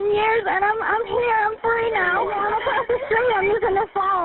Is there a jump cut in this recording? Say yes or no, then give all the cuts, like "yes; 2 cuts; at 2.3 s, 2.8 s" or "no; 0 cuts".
yes; 1 cut; at 2.2 s